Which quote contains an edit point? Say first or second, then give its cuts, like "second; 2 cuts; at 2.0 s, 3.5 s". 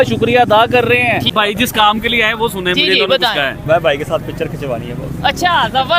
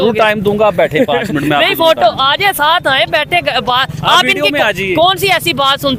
first; 1 cut; at 1.3 s